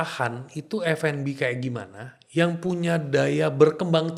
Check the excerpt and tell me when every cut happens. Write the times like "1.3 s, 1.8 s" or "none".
none